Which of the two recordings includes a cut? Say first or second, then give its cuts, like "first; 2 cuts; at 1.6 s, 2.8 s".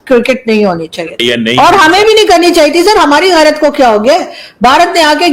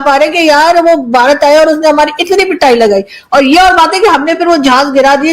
first; 1 cut; at 1.2 s